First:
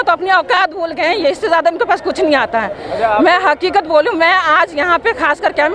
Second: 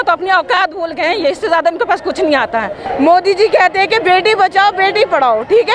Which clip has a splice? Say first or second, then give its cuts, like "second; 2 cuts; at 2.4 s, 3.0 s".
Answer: second; 1 cut; at 2.8 s